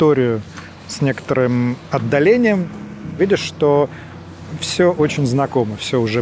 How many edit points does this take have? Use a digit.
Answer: 1